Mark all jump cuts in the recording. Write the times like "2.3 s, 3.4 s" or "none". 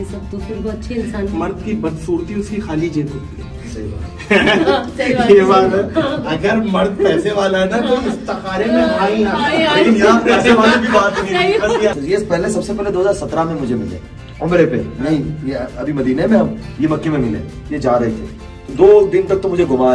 1.3 s, 11.9 s